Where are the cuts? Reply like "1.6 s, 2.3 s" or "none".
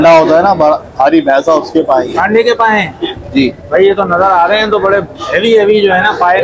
none